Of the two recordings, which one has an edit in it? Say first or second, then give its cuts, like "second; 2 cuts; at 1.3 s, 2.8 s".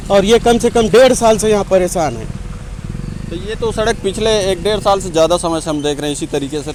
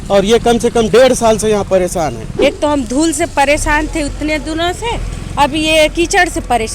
second; 1 cut; at 2.3 s